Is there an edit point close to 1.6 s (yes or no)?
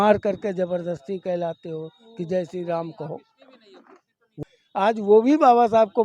no